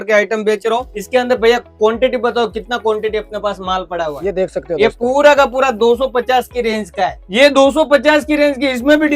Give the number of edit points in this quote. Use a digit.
2